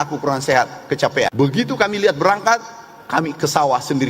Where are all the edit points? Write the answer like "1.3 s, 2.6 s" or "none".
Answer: 1.3 s